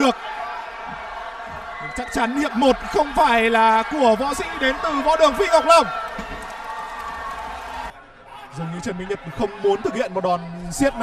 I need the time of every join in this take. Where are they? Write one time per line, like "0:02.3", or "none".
0:08.0